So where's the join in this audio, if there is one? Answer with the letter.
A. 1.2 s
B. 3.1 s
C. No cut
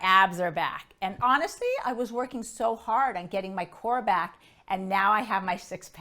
A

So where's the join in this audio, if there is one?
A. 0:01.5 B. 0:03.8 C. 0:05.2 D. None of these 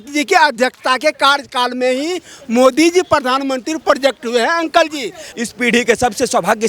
C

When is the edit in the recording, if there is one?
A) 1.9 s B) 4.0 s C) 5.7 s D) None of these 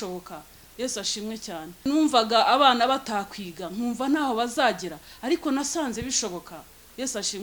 A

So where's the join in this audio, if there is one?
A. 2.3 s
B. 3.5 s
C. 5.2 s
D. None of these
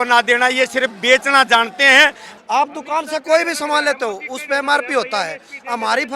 A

